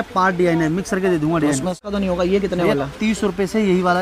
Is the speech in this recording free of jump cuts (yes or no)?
no